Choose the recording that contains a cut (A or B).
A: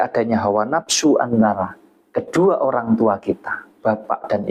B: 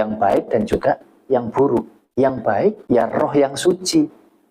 B